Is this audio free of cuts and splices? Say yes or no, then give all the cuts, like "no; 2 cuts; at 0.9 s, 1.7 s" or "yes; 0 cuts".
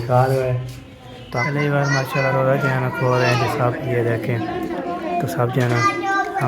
no; 1 cut; at 1.3 s